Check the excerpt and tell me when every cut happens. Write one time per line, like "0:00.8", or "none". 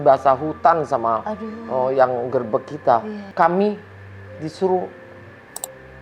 0:03.2

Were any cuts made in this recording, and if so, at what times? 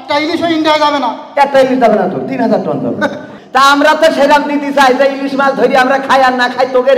0:03.2

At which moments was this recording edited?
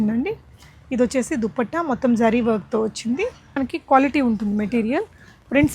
0:03.5

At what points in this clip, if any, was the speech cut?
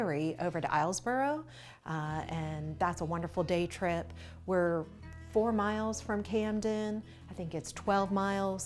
none

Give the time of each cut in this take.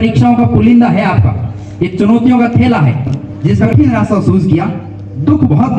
0:03.7

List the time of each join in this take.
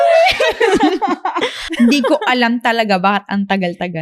0:01.6

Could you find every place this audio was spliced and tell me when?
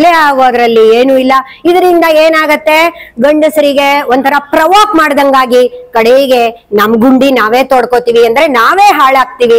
none

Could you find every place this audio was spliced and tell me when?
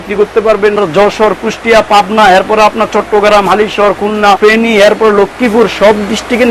0:00.8
0:04.4

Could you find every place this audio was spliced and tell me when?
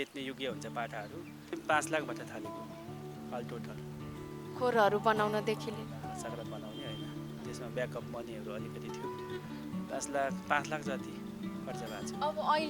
0:01.5

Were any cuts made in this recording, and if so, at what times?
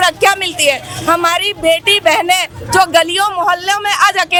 none

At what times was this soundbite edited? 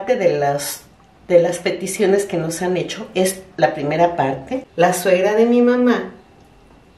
0:04.6

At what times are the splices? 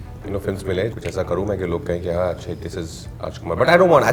0:00.9

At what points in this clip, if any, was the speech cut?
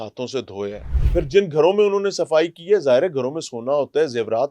0:00.9

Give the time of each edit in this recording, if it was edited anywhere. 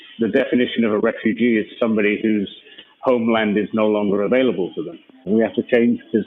0:05.3

